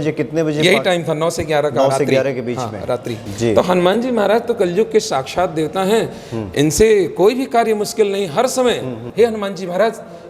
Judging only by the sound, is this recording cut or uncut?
cut